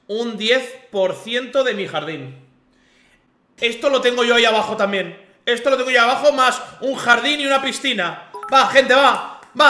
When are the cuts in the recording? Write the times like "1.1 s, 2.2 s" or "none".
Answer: none